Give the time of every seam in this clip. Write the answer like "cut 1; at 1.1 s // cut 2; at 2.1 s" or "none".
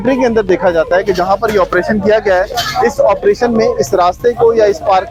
none